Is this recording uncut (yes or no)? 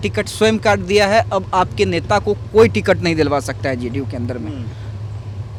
yes